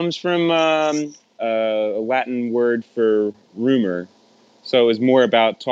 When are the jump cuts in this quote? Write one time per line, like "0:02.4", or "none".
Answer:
0:01.2